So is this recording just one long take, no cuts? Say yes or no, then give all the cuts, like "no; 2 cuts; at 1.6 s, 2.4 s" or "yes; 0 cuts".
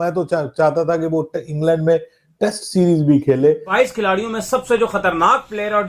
no; 1 cut; at 3.7 s